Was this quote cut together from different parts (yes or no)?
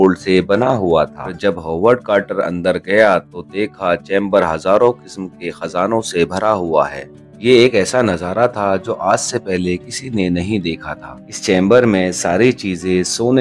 yes